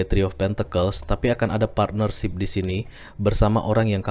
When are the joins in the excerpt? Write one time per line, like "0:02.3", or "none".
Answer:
none